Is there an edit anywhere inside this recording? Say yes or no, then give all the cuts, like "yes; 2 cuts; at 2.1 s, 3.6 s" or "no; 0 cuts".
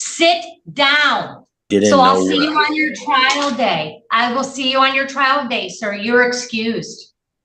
yes; 1 cut; at 1.7 s